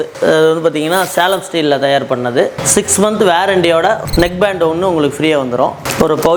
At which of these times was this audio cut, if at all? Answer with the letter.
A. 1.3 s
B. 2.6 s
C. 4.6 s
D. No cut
D